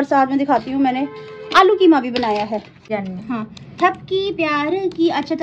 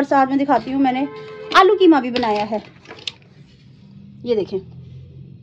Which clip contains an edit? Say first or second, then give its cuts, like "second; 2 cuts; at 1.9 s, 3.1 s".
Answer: first; 1 cut; at 2.9 s